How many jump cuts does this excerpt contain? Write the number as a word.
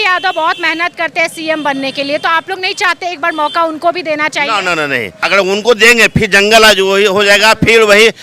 one